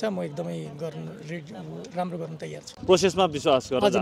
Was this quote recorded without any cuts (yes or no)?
yes